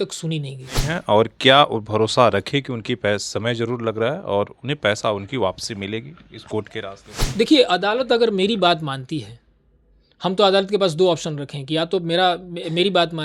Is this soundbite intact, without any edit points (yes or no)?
no